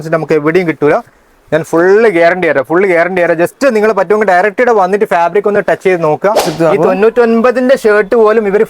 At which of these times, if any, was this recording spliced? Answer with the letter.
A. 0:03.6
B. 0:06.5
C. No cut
B